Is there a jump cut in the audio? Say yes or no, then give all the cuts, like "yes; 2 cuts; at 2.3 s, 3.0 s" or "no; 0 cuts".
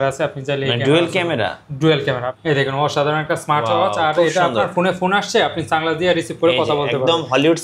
yes; 1 cut; at 2.3 s